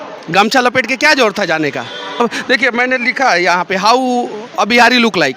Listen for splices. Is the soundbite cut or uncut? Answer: cut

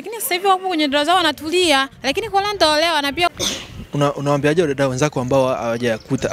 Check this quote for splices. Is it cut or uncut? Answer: cut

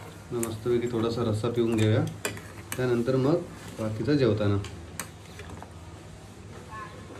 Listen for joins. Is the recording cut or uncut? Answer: uncut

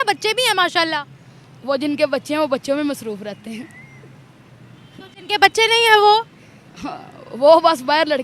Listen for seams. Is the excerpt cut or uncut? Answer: uncut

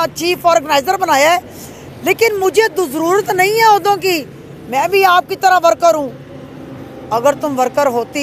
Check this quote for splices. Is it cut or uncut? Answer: uncut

